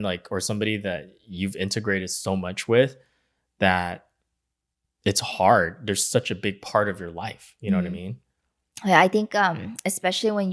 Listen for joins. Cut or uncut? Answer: uncut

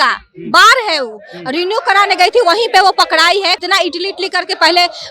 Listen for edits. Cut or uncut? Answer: cut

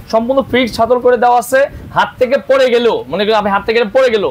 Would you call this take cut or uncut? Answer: uncut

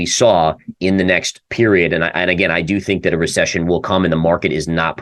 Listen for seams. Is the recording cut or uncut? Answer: uncut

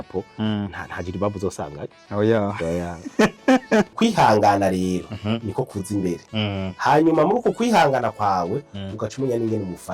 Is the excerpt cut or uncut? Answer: cut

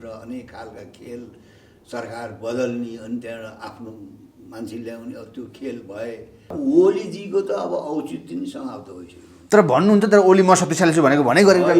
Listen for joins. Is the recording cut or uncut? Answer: cut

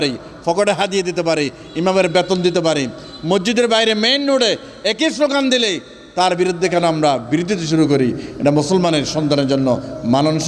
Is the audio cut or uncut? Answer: uncut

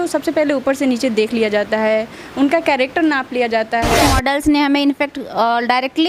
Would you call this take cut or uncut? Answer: cut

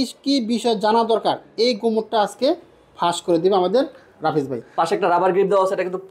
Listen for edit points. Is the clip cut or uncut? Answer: cut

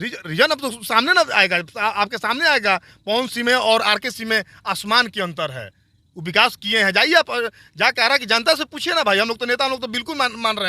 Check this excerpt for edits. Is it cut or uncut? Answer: uncut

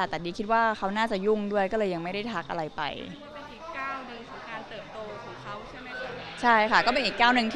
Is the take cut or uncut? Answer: uncut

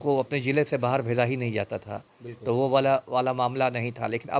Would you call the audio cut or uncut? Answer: uncut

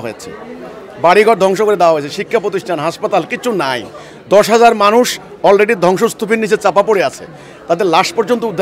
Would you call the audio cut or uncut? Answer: uncut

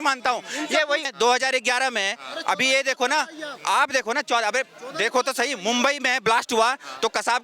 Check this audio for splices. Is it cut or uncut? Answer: cut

